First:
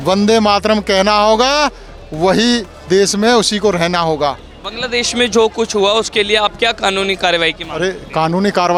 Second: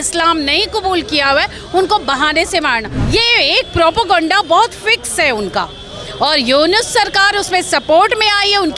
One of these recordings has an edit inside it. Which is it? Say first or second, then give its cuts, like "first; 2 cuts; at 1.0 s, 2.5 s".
second; 1 cut; at 2.9 s